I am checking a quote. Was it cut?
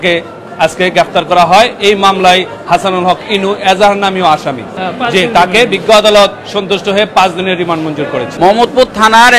yes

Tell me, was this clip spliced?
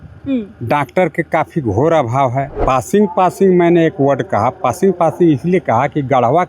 yes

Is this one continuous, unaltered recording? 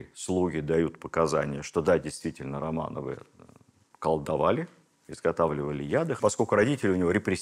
no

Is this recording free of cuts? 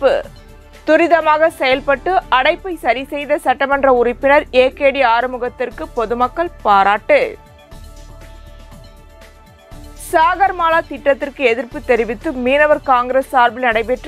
yes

